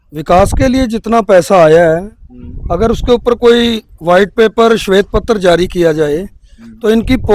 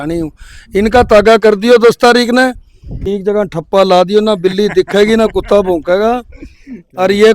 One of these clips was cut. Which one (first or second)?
second